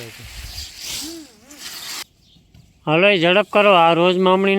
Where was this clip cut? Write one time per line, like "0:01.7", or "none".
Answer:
0:02.0

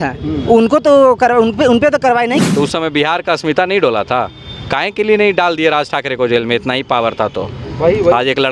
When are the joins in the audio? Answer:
0:02.4

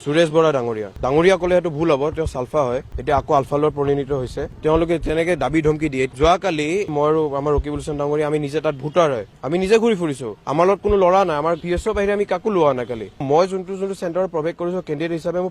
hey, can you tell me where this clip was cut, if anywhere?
none

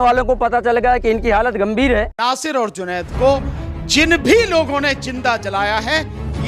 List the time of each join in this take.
0:02.1

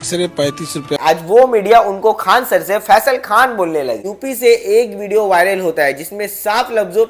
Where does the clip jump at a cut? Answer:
0:01.0
0:04.0

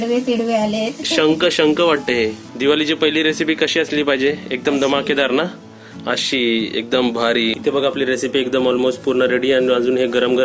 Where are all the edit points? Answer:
0:02.4
0:07.6

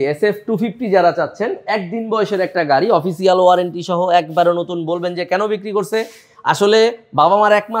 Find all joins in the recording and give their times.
none

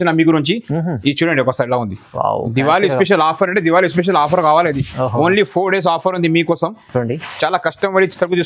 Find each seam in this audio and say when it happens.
none

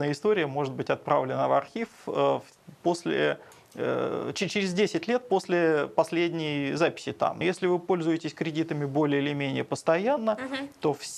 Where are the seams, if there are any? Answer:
0:07.4

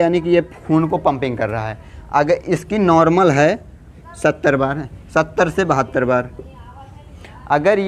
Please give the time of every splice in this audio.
none

